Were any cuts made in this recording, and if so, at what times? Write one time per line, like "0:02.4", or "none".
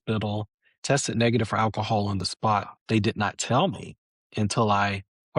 0:02.8